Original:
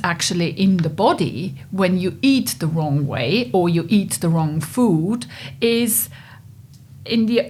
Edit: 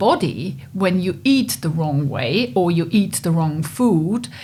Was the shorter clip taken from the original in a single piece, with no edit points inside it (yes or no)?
yes